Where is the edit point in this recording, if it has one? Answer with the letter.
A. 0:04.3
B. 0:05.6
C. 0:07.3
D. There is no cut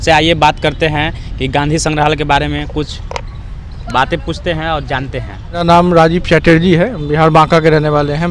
B